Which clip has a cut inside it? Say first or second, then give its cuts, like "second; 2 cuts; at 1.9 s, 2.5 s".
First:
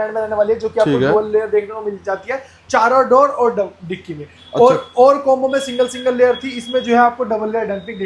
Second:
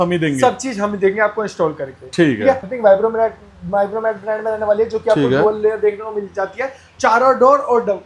second; 1 cut; at 2.7 s